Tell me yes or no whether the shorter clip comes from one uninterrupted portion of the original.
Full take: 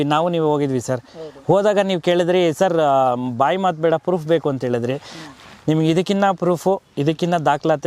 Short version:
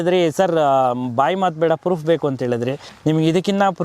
no